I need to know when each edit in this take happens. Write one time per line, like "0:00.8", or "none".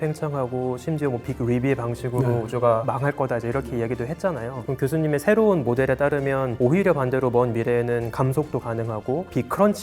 none